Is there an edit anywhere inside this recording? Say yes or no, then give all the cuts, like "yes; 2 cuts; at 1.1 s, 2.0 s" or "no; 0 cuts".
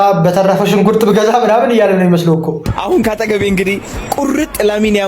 yes; 1 cut; at 2.6 s